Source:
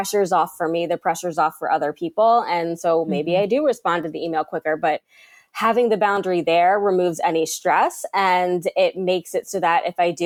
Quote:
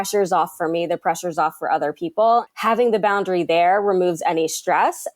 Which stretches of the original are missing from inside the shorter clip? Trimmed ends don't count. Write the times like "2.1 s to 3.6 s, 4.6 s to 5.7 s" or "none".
2.5 s to 5.4 s